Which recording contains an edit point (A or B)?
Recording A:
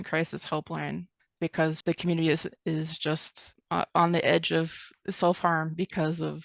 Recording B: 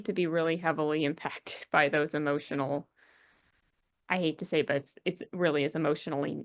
A